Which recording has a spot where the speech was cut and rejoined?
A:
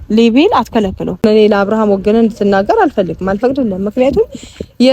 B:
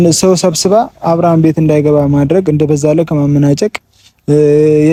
A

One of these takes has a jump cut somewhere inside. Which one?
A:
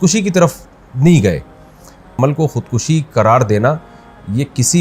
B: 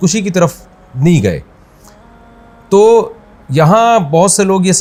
A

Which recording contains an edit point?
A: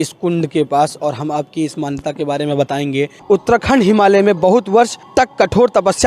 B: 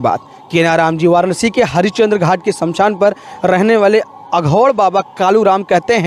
A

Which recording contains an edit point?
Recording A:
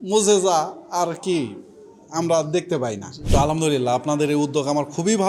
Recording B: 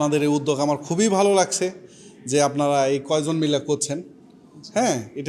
A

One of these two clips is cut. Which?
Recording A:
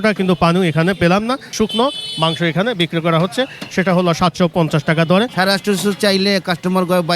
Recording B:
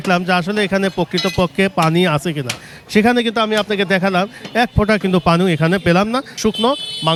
A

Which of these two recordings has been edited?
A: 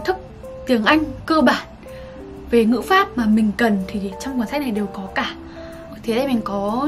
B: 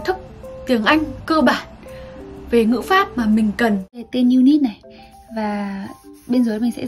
B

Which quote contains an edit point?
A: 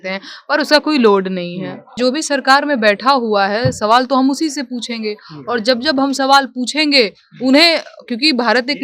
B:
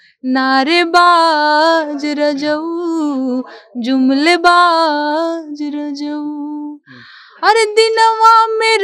A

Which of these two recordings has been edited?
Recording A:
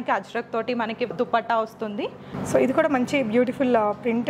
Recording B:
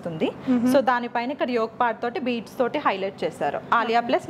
A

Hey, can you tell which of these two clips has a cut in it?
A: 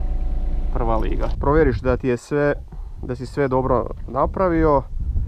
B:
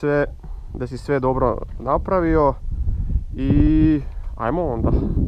A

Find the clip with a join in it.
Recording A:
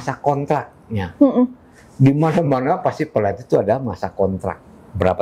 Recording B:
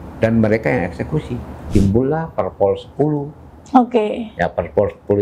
B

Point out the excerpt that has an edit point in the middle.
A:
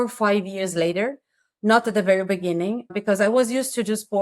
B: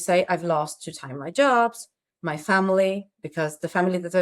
A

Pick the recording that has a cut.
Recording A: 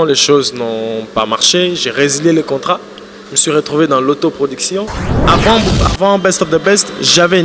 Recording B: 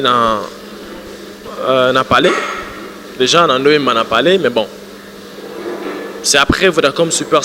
A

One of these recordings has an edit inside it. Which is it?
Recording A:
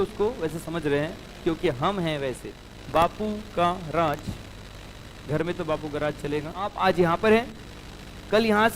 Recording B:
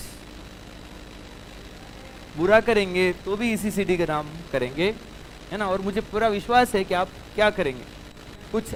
A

